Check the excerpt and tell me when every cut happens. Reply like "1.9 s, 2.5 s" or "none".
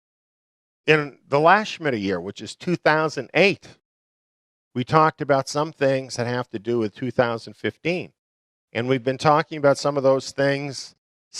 8.4 s